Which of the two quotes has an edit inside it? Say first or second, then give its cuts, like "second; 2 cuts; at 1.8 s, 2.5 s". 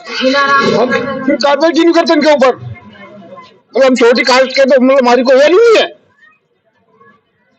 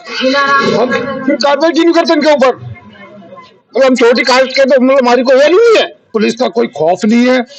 second; 1 cut; at 6.0 s